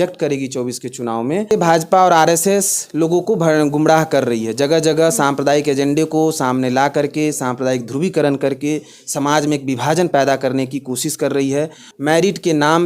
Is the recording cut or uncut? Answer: cut